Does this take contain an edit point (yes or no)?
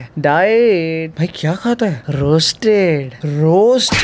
no